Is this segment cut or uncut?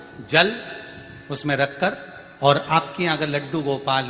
uncut